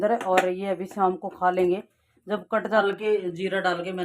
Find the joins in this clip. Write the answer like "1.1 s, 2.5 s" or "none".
2.8 s